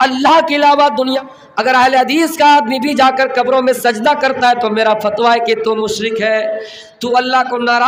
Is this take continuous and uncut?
no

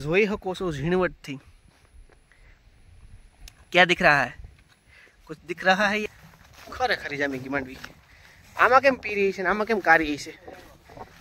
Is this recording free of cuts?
no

